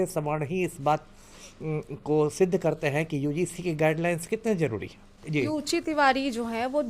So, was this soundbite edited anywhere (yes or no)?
yes